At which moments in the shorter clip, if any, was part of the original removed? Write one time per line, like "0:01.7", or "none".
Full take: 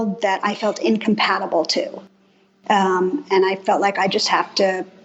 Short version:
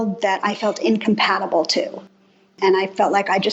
0:02.5